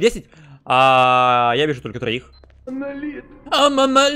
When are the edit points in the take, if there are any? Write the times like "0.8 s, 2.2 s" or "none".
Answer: 2.6 s